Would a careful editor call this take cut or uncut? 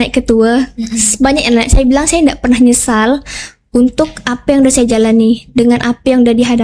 uncut